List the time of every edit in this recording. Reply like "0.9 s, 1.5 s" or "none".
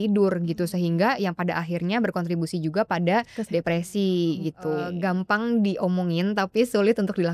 4.9 s